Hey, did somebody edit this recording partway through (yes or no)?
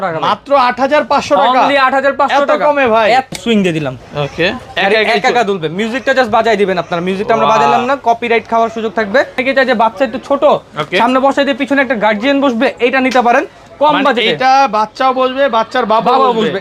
yes